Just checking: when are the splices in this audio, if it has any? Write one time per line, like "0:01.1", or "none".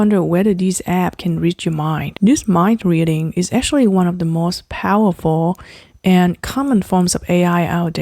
0:02.1